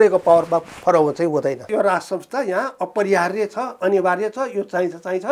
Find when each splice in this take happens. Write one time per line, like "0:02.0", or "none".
0:01.7